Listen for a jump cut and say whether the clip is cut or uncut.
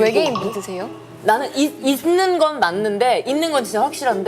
cut